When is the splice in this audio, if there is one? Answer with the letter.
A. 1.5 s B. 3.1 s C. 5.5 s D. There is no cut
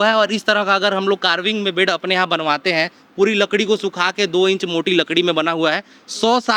D